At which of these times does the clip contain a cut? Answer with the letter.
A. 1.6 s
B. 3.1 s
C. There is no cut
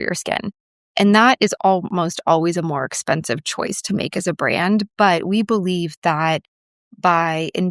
A